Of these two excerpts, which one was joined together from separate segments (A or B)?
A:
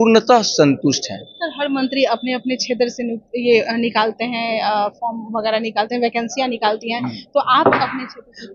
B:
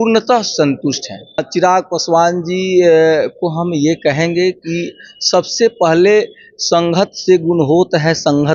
B